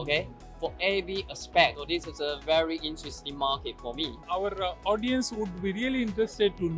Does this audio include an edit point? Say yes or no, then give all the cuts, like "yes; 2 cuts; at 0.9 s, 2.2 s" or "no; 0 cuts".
yes; 2 cuts; at 1.8 s, 4.3 s